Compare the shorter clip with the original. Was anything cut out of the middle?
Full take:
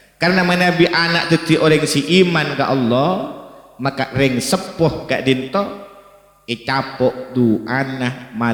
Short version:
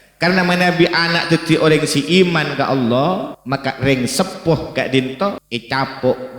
yes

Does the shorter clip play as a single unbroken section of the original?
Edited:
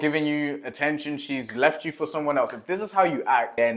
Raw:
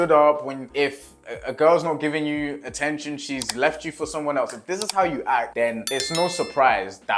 yes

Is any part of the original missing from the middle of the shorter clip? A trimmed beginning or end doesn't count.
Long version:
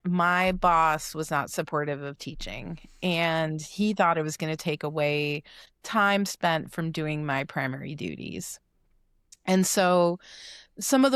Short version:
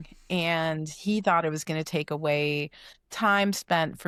no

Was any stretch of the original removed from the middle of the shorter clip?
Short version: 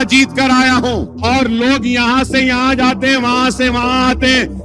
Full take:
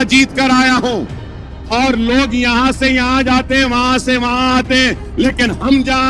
yes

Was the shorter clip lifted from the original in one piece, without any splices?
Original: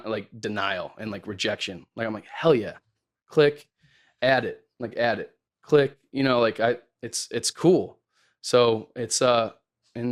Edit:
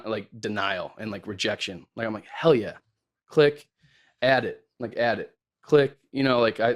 yes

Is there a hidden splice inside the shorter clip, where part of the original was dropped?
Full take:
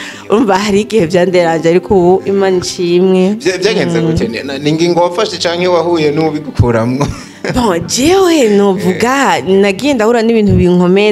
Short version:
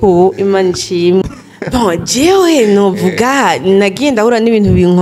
yes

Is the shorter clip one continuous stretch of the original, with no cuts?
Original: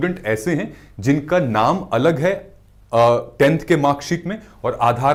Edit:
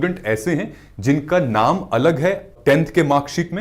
no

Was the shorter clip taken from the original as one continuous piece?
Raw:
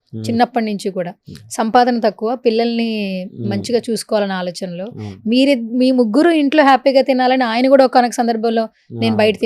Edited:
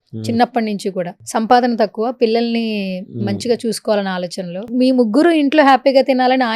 no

